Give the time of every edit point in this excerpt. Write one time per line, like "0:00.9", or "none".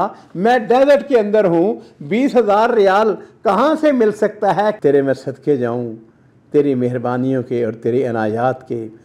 0:04.8